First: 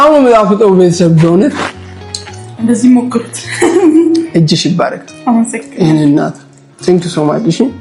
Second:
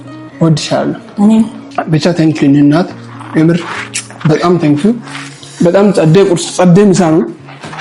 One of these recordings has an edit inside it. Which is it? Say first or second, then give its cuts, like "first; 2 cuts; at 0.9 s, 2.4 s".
second; 1 cut; at 1.6 s